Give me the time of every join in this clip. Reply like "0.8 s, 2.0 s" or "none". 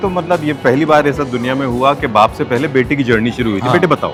none